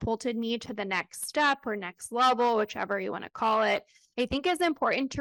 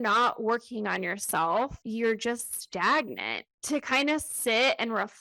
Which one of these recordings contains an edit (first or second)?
second